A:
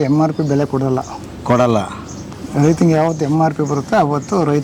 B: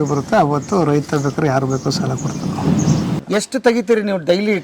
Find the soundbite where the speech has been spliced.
B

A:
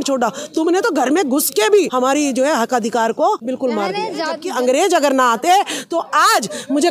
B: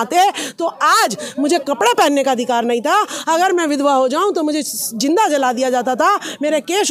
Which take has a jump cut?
A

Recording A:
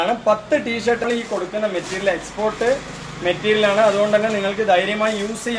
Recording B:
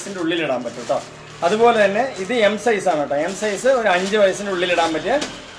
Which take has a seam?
A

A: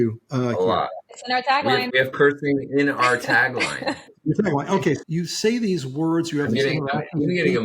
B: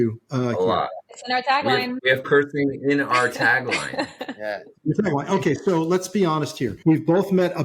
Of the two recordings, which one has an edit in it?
A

